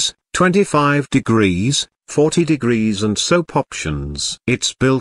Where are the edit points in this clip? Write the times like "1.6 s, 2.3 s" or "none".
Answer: 3.8 s